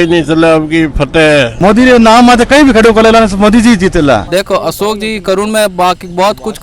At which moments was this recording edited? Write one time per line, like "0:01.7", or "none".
0:01.5
0:04.3